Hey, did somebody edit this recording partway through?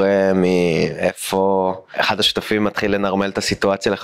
yes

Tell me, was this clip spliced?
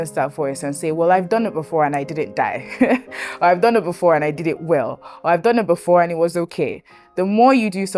no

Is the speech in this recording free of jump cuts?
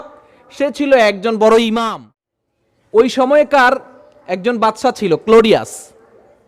no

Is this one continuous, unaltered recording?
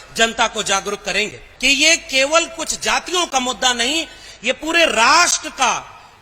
no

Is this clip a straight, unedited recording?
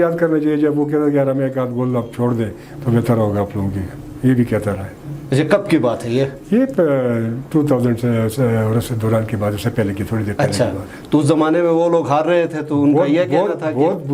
yes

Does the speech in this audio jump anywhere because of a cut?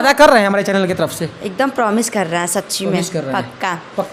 no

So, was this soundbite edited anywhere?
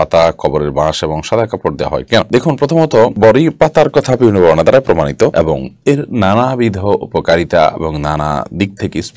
no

